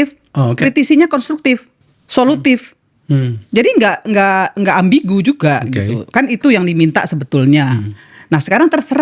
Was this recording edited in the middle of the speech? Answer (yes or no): no